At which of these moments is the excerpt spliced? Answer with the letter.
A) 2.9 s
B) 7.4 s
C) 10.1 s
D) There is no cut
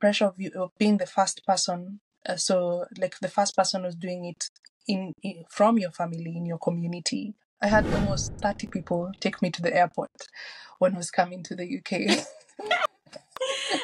B